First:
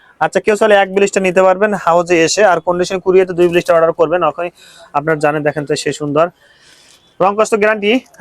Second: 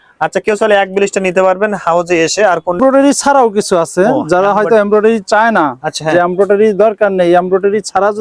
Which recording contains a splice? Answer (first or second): second